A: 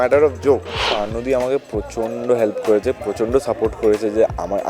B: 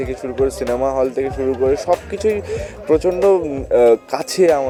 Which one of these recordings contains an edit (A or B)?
A